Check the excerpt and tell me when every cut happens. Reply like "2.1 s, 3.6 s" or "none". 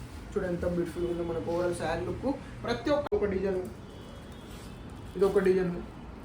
3.1 s